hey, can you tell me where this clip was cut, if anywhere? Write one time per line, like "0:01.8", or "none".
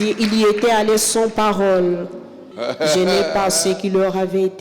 0:02.5